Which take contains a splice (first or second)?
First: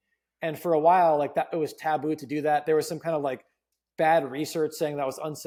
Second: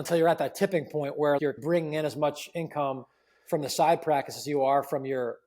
second